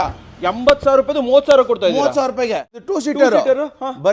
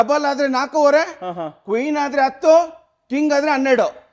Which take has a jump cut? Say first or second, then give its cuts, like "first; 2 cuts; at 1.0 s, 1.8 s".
first; 1 cut; at 2.7 s